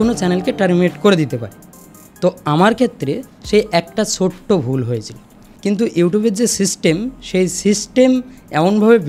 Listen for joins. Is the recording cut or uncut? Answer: cut